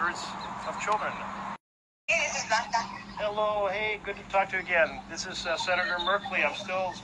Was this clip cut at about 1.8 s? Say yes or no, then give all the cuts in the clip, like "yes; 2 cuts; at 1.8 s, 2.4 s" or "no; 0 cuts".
yes; 1 cut; at 1.8 s